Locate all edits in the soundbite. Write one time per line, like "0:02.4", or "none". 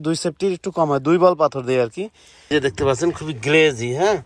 0:02.5